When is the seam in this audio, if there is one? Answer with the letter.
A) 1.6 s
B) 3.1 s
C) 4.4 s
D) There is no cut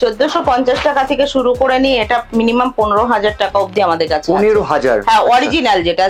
D